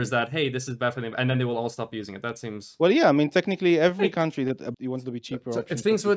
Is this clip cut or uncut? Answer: cut